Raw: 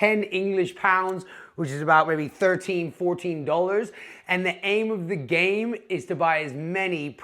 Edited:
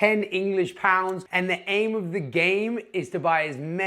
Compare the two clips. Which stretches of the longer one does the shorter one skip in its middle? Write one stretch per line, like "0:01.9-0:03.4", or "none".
0:01.2-0:04.2

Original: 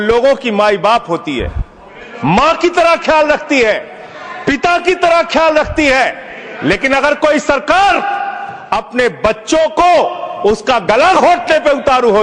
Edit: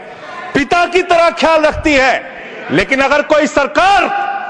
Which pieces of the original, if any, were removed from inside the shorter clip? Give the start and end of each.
none

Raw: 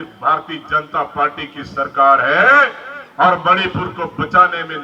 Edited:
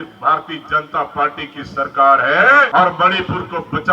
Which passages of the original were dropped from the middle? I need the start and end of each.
0:02.7-0:03.1

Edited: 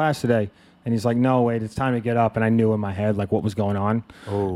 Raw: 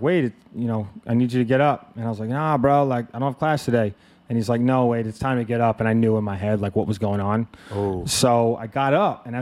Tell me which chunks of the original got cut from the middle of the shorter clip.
none

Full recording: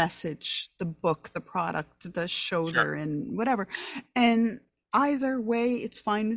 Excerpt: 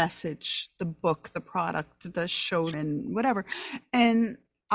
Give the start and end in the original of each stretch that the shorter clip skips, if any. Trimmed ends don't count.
0:02.7-0:03.0

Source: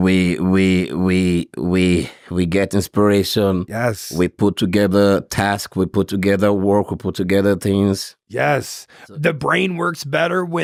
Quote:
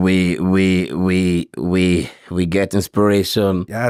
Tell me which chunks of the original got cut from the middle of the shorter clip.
none

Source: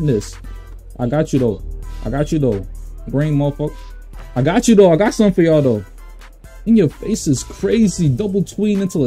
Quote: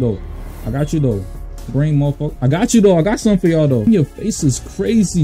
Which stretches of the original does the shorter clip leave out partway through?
0:03.7-0:04.3
0:05.8-0:06.7

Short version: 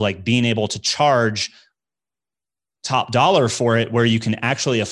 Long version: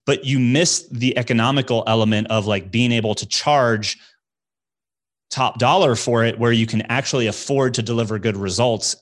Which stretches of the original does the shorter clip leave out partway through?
none

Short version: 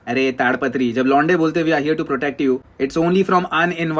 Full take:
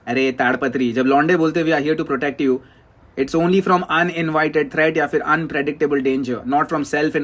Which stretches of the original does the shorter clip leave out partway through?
0:02.7-0:03.1

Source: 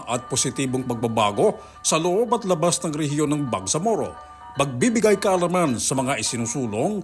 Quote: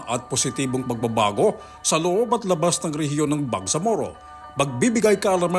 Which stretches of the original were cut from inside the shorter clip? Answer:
none

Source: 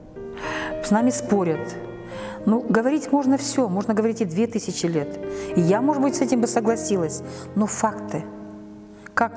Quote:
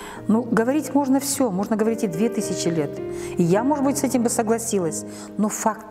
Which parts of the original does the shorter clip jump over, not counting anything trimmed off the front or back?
none

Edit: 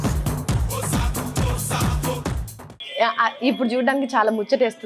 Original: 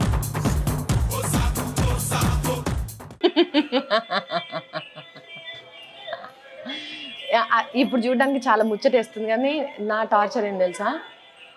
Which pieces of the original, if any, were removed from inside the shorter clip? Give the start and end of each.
0:03.0-0:06.9

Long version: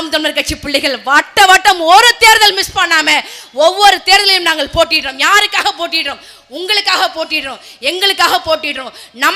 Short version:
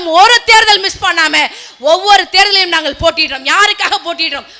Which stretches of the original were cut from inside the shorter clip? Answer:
none

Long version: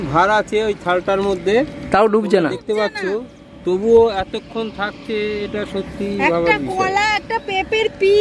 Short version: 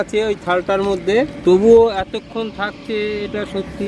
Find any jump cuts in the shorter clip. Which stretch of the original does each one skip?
0:01.7-0:03.5

